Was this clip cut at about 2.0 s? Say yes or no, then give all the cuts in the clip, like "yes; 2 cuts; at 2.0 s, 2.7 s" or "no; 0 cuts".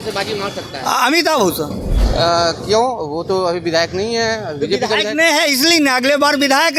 yes; 1 cut; at 2.0 s